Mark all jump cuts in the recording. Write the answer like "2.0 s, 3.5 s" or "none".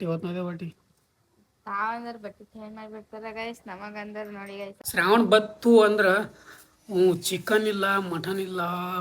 4.7 s